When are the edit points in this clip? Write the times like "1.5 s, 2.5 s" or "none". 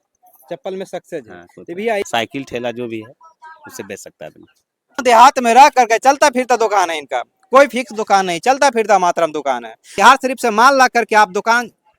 2.0 s, 5.0 s, 10.0 s